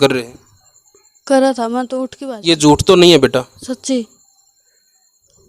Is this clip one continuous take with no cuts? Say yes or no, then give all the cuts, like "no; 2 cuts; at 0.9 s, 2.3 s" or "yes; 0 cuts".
no; 1 cut; at 2.1 s